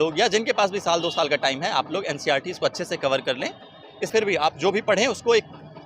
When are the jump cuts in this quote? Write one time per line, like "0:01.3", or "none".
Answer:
0:04.1